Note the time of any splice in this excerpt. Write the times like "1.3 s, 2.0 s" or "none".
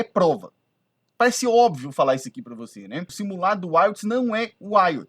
3.2 s